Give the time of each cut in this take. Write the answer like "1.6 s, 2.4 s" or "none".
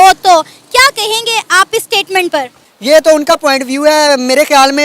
2.6 s